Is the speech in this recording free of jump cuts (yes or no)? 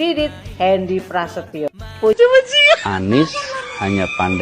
no